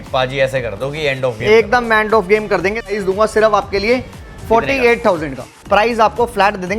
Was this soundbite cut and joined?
yes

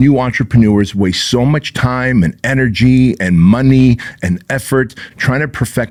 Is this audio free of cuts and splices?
yes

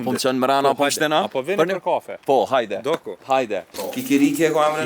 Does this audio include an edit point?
yes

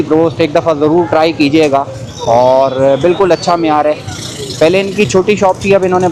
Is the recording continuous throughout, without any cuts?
yes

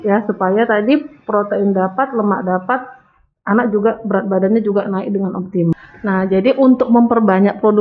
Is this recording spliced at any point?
yes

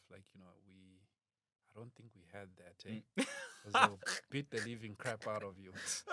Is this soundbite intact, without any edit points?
yes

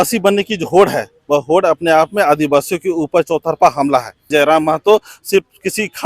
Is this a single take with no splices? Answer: no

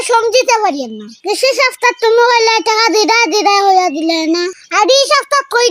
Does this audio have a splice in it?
yes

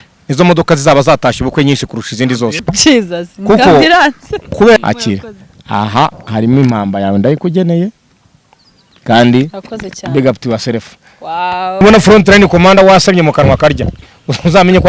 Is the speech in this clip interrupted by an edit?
yes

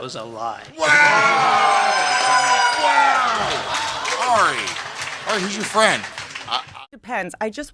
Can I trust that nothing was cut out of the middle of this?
no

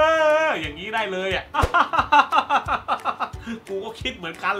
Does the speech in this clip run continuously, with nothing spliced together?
no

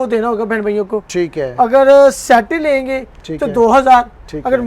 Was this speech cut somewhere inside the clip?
no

